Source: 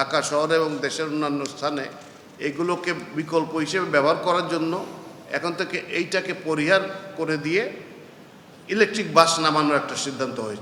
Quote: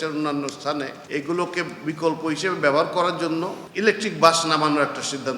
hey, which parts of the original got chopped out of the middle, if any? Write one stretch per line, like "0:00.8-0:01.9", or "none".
0:01.9-0:02.3
0:04.9-0:08.6